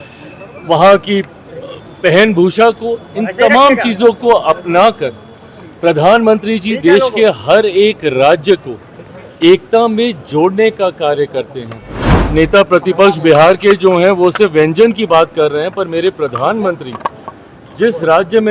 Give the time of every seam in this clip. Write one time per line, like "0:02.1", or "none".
0:12.2

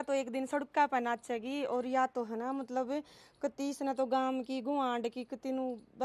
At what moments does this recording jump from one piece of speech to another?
none

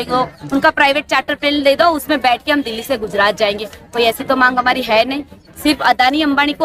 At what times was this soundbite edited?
0:05.4

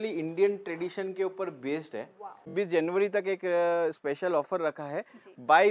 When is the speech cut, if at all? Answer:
0:02.5

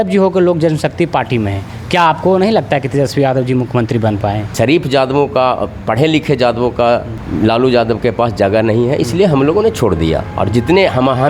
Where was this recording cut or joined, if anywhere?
0:04.5
0:07.2

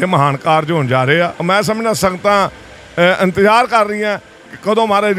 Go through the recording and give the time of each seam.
0:01.4

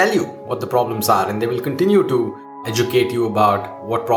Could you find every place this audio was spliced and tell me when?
0:02.7

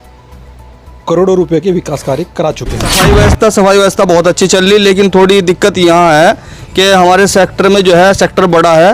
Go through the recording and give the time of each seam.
0:02.9

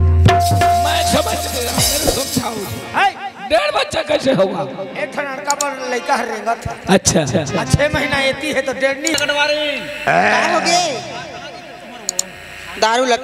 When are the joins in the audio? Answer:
0:09.2

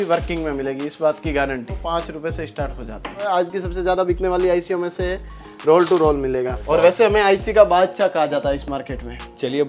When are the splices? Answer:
0:01.8
0:03.2
0:06.6

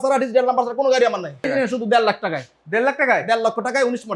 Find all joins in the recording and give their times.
0:01.5

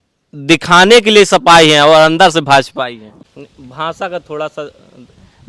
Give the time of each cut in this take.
0:03.0

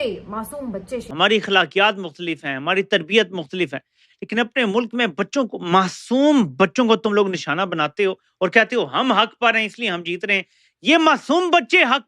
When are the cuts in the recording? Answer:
0:01.1

